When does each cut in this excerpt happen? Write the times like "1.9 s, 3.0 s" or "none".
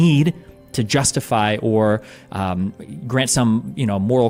none